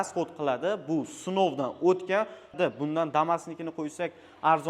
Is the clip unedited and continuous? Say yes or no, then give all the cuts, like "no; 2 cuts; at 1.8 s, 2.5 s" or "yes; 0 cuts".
no; 1 cut; at 2.5 s